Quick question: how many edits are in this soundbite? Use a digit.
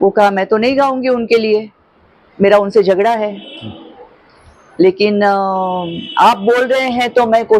0